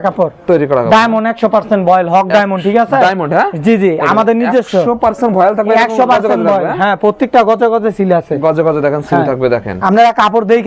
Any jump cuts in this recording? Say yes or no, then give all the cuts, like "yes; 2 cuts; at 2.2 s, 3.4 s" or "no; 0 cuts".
no; 0 cuts